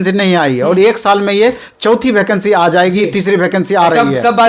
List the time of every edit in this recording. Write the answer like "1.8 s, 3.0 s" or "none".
none